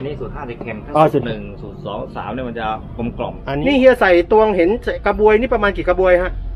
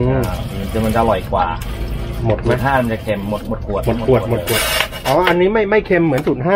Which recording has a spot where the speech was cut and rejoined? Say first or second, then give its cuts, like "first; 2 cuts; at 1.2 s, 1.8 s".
first; 1 cut; at 3.3 s